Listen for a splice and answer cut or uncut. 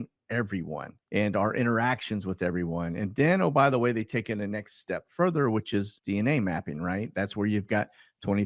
cut